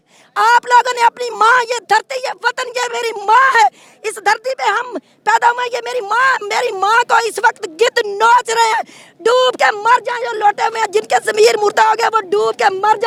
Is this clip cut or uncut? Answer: uncut